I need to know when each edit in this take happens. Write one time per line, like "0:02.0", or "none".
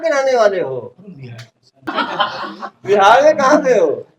0:01.9